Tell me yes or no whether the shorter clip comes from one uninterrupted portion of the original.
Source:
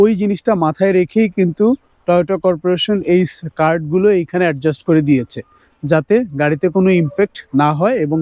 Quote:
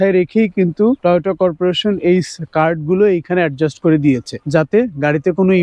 no